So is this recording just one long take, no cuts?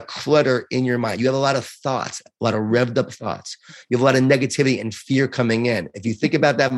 yes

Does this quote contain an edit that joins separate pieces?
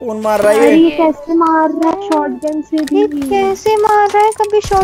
no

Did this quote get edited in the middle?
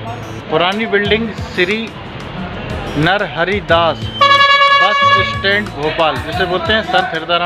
no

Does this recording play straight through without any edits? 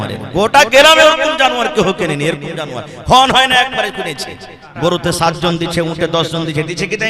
no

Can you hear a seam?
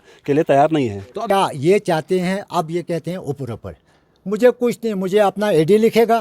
yes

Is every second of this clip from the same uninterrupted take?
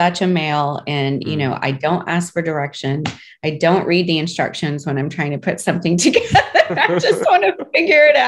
yes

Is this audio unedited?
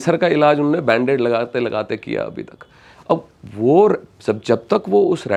yes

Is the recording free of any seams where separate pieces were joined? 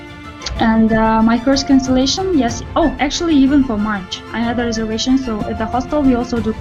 yes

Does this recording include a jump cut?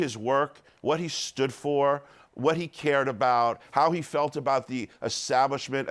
yes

